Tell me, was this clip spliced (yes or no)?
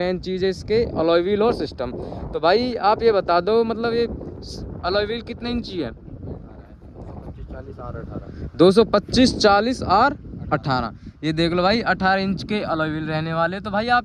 no